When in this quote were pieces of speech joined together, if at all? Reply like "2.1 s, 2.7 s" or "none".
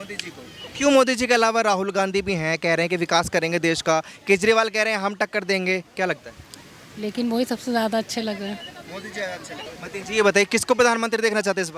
9.8 s